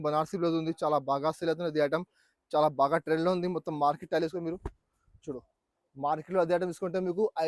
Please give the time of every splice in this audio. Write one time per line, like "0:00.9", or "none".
none